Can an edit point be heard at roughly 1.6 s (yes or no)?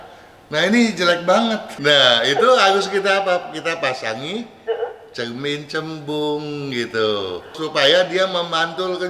yes